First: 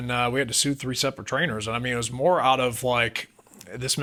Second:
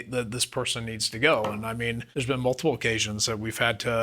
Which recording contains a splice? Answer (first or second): second